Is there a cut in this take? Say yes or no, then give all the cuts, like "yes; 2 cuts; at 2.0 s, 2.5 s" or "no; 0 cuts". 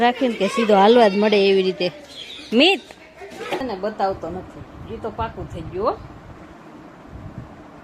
yes; 1 cut; at 3.6 s